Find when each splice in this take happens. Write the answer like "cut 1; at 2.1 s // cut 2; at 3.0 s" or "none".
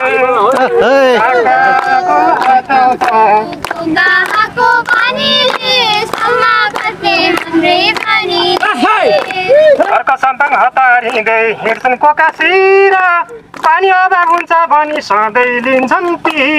none